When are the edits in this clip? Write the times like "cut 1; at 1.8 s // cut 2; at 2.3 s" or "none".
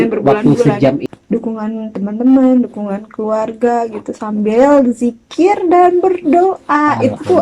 cut 1; at 1.1 s